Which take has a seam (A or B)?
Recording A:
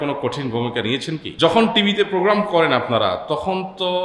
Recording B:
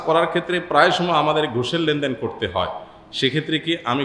A